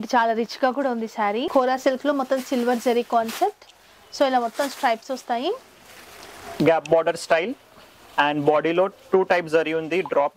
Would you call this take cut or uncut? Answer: cut